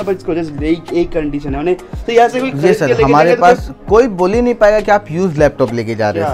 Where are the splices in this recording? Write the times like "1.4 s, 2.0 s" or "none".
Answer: none